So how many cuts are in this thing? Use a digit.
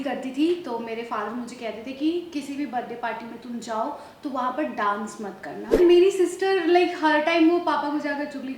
1